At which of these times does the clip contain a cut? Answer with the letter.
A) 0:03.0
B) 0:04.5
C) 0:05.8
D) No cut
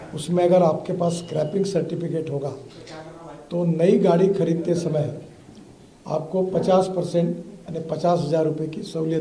D